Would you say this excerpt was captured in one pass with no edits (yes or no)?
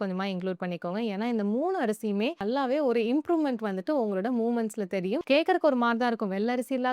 no